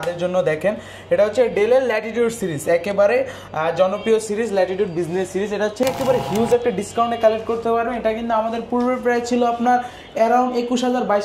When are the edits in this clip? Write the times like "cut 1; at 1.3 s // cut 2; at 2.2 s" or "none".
cut 1; at 5.8 s